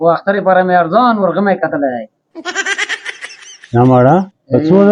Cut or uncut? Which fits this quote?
uncut